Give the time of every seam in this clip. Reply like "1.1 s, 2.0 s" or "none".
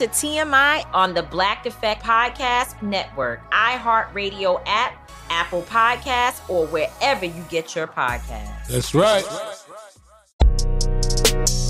10.5 s